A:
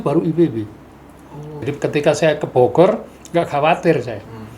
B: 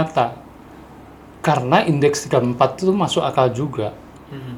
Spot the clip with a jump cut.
A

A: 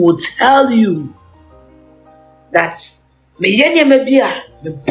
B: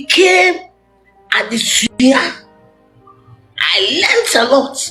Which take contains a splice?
A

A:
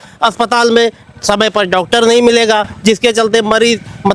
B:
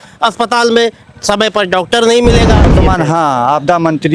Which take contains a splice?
B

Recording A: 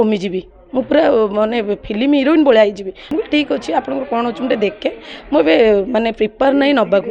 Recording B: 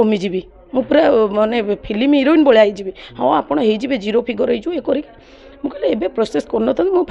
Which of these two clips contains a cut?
A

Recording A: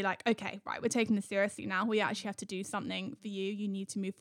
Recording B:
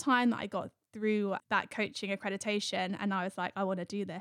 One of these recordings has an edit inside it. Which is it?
B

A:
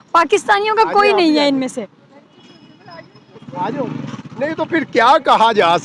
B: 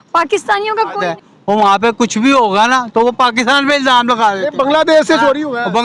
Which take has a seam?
B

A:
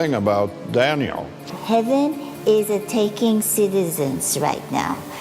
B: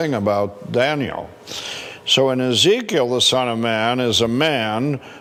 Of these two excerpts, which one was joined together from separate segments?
A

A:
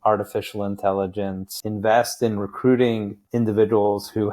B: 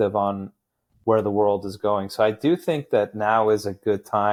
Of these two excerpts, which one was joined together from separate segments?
A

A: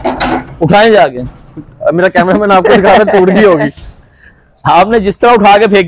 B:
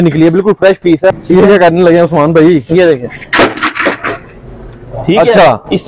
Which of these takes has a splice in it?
B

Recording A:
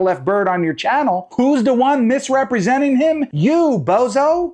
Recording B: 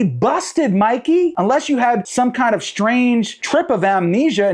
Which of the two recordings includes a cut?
B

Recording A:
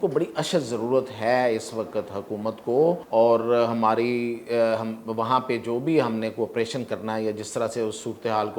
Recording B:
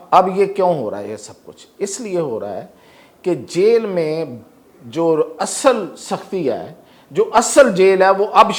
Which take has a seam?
A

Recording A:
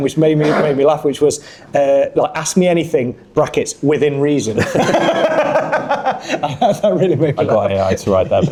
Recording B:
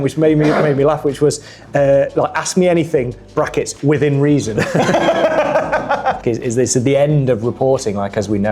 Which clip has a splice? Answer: B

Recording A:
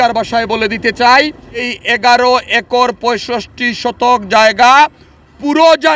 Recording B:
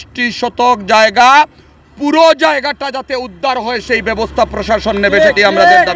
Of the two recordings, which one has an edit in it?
A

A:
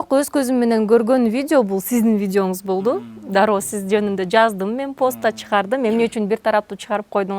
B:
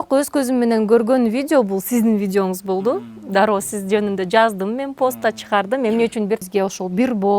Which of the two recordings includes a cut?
B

